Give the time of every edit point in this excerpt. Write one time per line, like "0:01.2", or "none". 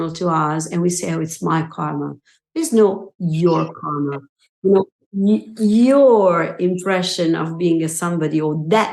none